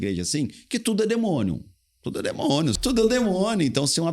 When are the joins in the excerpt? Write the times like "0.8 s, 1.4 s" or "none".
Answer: 2.8 s